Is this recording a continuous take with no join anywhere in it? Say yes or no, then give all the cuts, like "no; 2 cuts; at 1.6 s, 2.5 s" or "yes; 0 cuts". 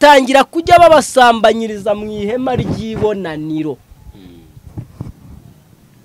yes; 0 cuts